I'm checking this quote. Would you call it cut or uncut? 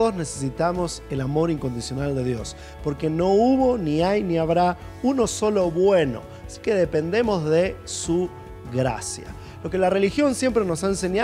uncut